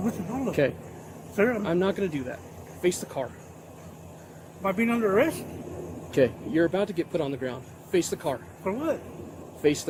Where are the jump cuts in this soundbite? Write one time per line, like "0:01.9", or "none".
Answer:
none